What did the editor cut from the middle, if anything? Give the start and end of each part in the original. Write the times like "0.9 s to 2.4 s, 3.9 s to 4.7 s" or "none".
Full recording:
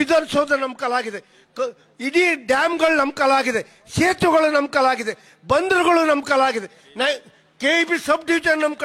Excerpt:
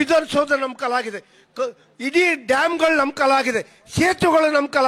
none